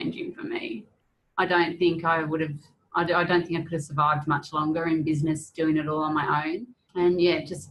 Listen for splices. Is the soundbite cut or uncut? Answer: cut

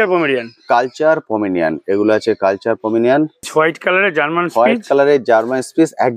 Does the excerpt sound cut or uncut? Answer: cut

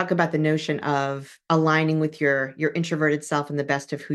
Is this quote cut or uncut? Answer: cut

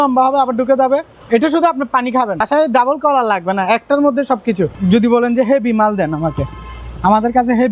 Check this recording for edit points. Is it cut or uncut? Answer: cut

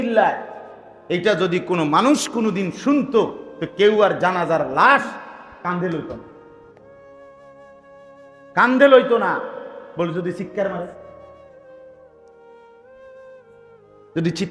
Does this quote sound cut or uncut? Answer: cut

